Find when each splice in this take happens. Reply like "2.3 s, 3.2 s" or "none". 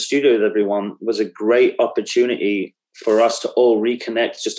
none